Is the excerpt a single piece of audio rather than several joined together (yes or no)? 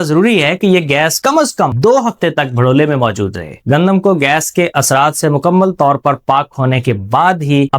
no